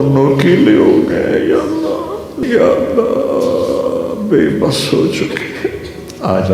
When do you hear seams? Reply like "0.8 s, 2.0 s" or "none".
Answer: 2.3 s